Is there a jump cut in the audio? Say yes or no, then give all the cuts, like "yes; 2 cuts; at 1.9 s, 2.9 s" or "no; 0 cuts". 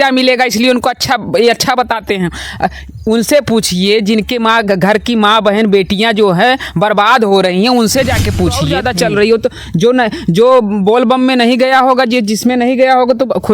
yes; 1 cut; at 8.9 s